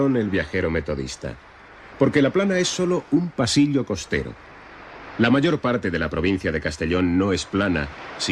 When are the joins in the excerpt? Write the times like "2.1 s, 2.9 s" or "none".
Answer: 3.7 s